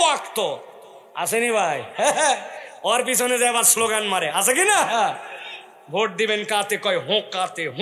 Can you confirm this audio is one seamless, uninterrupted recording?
yes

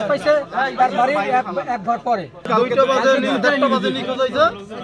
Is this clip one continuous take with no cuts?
no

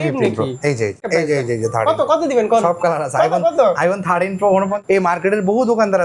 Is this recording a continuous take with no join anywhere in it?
no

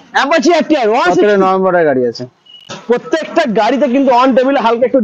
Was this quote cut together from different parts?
yes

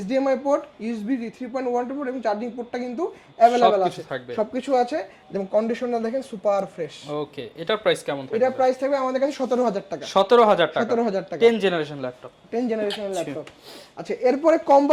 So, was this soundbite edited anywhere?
no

